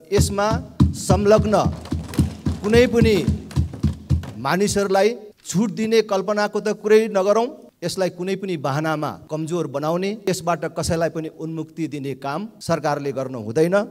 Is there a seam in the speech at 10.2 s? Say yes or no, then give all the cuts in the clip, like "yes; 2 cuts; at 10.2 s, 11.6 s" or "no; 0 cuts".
yes; 5 cuts; at 5.3 s, 7.7 s, 9.2 s, 10.2 s, 12.5 s